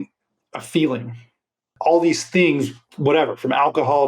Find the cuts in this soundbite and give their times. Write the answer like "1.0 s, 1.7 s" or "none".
1.7 s